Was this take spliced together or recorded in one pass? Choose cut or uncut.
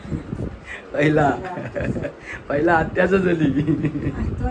uncut